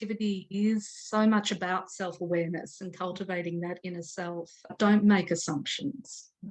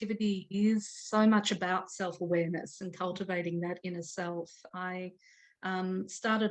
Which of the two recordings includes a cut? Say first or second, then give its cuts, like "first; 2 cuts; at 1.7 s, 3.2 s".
first; 1 cut; at 4.7 s